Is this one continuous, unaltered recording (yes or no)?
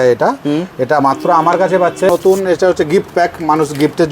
no